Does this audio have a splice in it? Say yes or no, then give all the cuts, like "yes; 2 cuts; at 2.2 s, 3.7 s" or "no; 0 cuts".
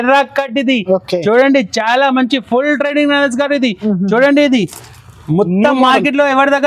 no; 0 cuts